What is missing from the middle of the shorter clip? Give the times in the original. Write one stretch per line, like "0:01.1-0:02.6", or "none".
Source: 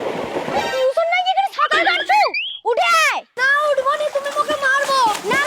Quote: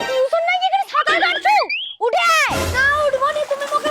none